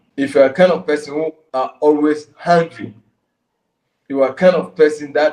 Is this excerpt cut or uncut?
cut